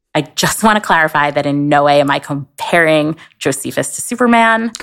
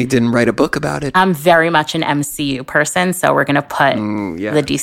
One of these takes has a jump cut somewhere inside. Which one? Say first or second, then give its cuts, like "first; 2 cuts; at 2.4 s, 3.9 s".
second; 1 cut; at 1.0 s